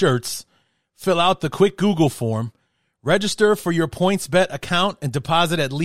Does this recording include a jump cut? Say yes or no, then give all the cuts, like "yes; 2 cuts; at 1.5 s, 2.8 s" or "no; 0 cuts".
no; 0 cuts